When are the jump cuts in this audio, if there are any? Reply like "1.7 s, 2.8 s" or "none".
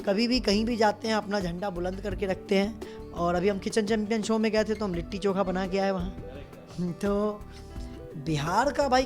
none